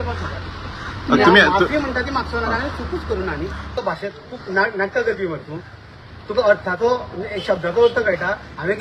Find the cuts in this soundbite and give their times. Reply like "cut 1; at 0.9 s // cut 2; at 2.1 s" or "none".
cut 1; at 3.7 s